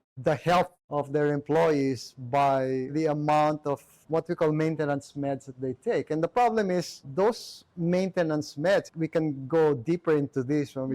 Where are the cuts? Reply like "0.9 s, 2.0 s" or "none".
2.9 s

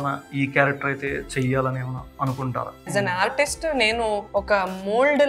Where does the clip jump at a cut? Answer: 2.9 s, 4.2 s

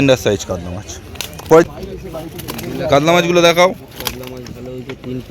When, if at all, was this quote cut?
1.6 s

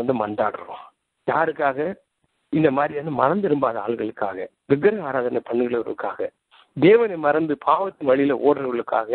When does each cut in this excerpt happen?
none

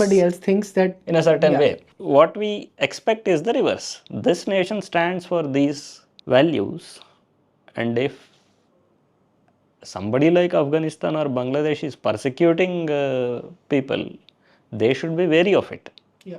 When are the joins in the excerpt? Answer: 1.9 s

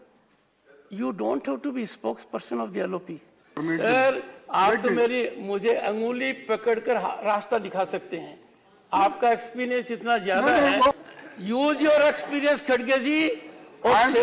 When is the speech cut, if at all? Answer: 3.6 s, 11.0 s

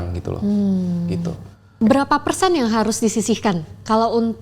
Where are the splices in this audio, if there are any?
1.7 s

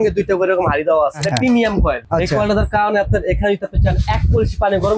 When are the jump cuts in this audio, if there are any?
1.2 s, 2.0 s

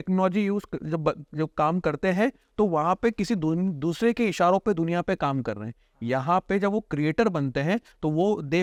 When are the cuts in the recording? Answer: none

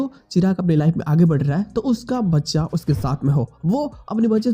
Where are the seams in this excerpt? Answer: none

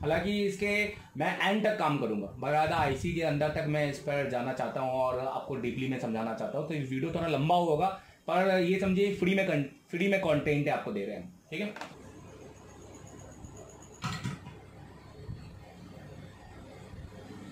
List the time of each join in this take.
11.9 s

